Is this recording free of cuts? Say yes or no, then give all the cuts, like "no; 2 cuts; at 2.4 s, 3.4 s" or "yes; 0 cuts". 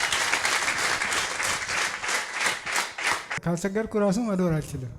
no; 1 cut; at 3.3 s